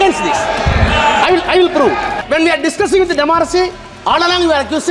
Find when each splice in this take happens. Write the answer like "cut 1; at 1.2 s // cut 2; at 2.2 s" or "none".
cut 1; at 2.2 s